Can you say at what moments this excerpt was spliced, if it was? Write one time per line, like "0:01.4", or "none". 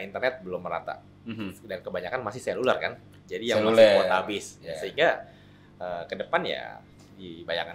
none